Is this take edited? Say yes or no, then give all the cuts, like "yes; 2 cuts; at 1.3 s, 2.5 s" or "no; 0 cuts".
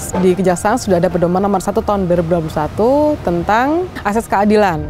yes; 1 cut; at 4.0 s